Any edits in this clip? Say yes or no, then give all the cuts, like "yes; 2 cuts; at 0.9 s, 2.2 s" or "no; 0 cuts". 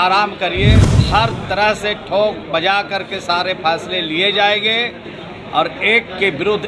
yes; 1 cut; at 0.9 s